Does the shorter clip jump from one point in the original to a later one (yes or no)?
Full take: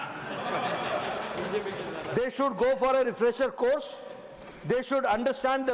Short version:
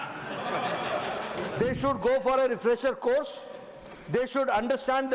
yes